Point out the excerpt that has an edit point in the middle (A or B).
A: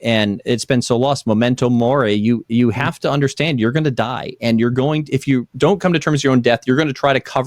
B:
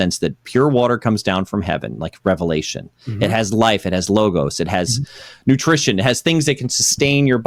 A